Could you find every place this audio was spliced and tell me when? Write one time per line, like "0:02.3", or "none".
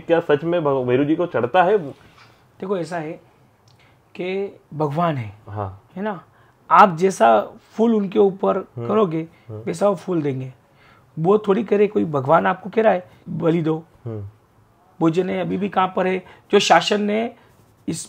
0:04.6
0:05.8
0:13.2

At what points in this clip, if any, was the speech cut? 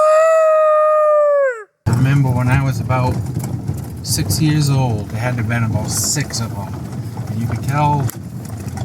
0:01.8
0:05.1

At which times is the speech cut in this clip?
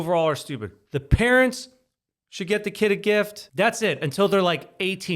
0:03.4

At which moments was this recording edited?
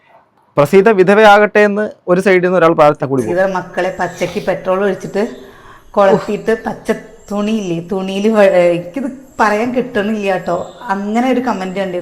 0:03.1

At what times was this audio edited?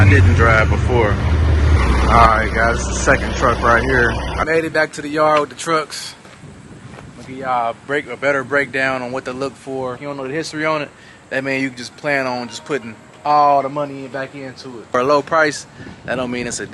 0:01.8
0:04.4
0:10.0
0:14.9

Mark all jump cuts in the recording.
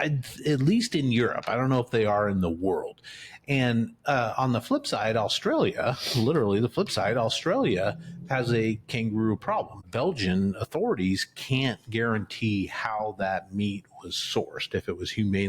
0:09.8

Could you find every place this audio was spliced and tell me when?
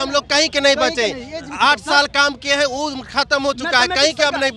none

